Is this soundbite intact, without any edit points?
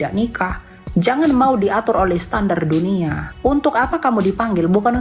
no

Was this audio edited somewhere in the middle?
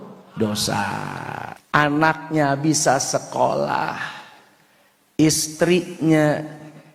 yes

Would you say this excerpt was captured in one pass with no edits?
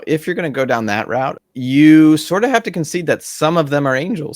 no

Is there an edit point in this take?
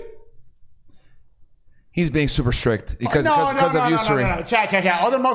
no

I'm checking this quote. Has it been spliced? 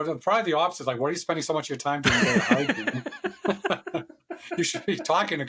no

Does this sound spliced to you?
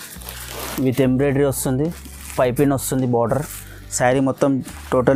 no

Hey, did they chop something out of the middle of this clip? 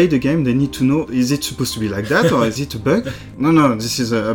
yes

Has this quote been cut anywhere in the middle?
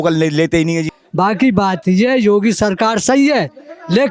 yes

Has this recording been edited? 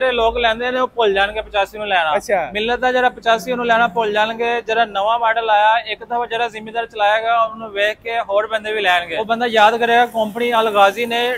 yes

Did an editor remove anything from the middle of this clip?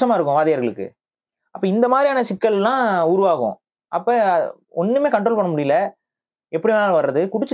no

